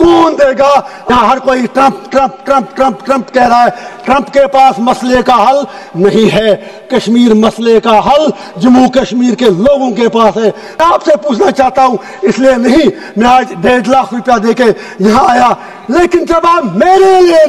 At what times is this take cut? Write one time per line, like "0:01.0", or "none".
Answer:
0:01.1
0:10.7